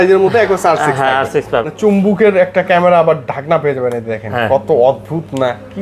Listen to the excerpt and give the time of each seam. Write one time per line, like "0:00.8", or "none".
0:01.7